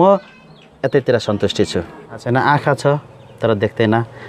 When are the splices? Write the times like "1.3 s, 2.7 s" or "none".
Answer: 2.2 s

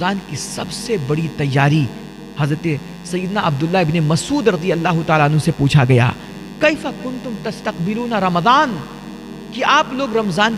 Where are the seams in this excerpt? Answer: none

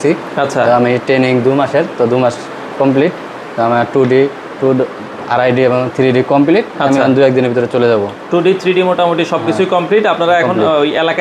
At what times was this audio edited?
none

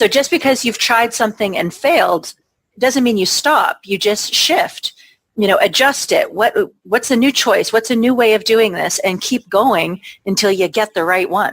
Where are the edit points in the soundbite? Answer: none

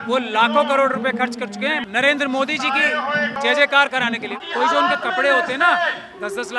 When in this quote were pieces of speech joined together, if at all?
1.8 s, 3.3 s, 4.3 s

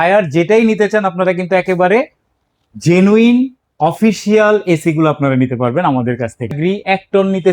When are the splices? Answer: 6.5 s

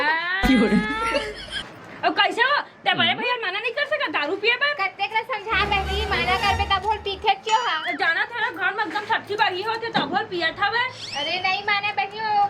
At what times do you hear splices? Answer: none

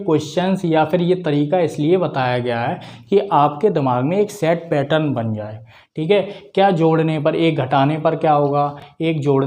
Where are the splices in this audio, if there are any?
none

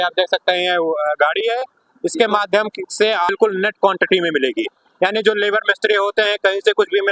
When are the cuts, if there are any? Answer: 3.3 s

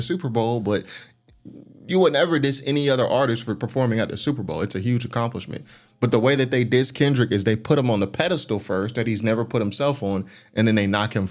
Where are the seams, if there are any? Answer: none

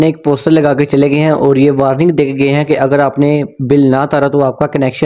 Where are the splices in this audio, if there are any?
none

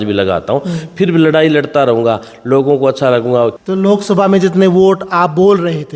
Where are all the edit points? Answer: 3.6 s

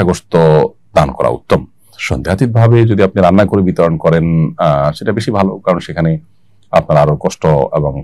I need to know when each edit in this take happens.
none

